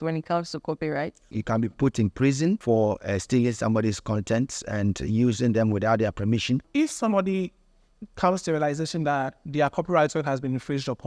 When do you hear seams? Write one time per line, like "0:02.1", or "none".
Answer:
0:01.3
0:02.6
0:06.7